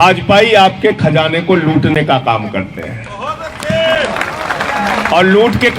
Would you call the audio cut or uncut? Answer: uncut